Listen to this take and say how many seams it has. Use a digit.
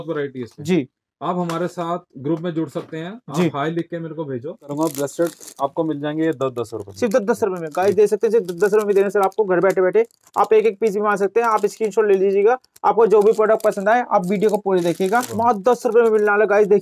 2